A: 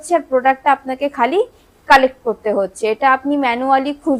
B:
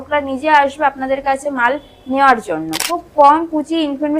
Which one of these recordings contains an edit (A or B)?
B